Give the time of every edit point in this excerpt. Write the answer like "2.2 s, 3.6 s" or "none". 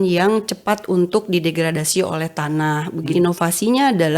3.1 s